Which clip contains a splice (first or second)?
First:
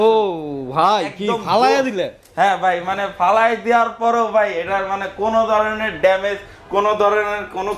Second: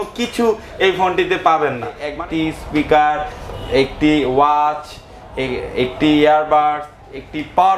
second